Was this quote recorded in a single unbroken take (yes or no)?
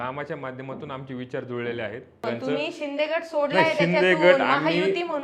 no